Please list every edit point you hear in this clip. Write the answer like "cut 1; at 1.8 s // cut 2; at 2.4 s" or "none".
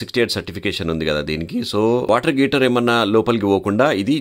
none